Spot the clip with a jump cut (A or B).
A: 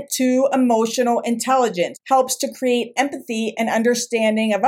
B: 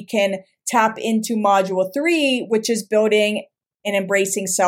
A